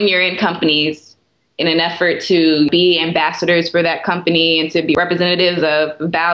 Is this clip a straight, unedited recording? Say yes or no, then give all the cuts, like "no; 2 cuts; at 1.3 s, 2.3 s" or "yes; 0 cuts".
no; 2 cuts; at 2.7 s, 4.9 s